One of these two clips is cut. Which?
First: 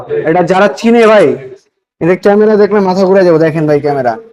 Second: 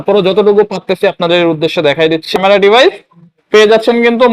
second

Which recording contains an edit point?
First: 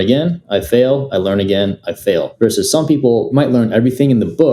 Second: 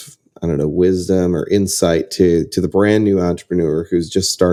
first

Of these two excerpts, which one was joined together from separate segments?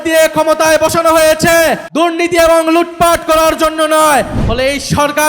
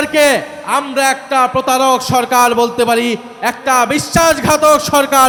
first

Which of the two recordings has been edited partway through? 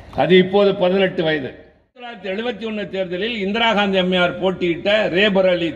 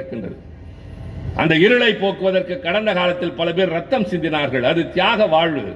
first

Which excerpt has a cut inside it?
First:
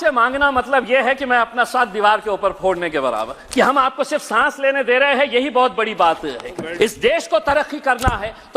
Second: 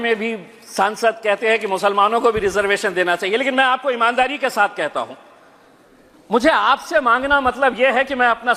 first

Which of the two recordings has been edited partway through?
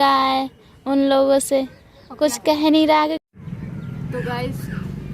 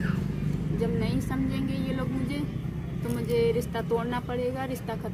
first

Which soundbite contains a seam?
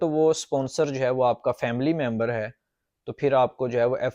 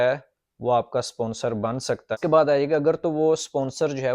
second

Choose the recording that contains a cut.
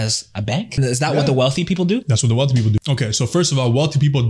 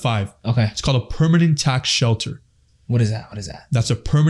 first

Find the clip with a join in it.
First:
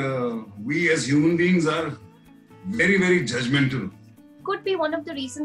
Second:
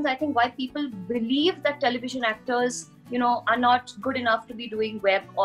first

